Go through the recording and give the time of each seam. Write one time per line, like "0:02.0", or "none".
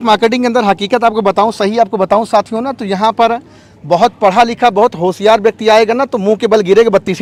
none

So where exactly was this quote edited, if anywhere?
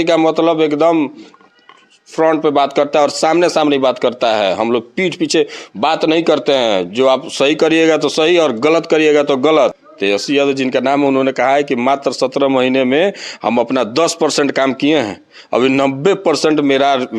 0:09.9

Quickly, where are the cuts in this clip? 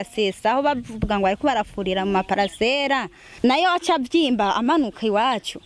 0:03.2

